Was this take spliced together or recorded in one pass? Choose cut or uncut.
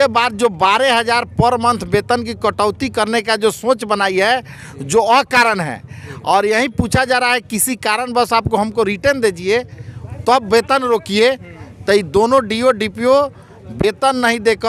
uncut